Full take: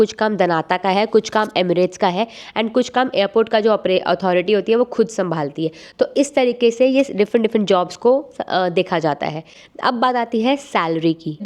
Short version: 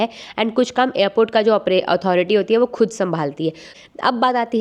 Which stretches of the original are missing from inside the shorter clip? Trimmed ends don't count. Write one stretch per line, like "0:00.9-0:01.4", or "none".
0:05.8-0:09.5